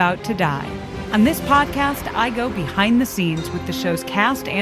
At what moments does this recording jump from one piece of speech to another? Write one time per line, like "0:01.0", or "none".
0:00.9